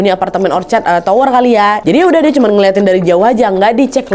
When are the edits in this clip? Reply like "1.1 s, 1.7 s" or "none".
1.8 s